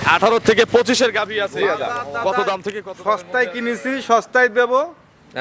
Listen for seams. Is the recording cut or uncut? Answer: cut